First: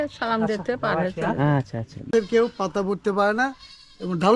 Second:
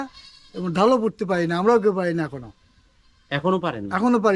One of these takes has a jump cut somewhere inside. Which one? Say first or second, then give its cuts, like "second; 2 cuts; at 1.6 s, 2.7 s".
first; 1 cut; at 2.1 s